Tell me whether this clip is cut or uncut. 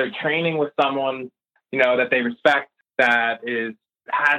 cut